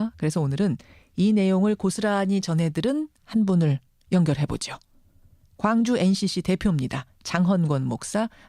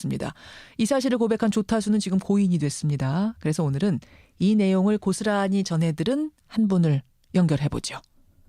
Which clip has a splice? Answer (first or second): first